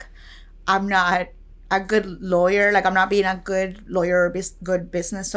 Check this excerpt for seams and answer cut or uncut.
uncut